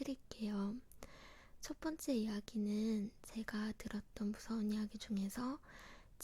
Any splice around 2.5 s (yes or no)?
no